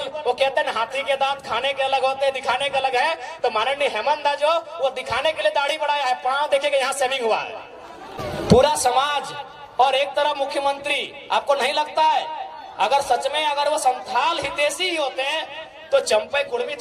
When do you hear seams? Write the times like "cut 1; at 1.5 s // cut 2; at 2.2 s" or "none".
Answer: cut 1; at 8.1 s